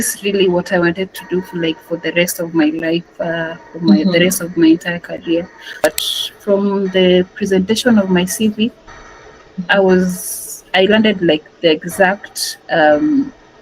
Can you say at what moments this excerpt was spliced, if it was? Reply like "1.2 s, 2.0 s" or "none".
5.8 s